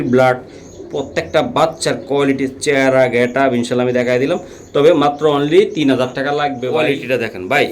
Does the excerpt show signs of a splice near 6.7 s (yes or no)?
yes